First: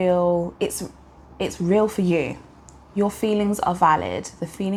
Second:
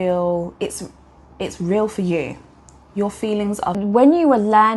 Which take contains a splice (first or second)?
second